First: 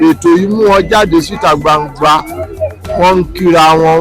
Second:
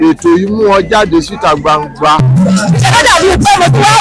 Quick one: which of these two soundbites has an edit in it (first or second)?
second